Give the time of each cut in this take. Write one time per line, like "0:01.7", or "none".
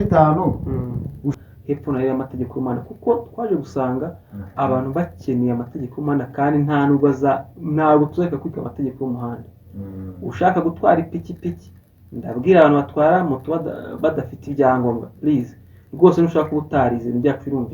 0:01.4